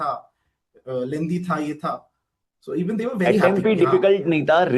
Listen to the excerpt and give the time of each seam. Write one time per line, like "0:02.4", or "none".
none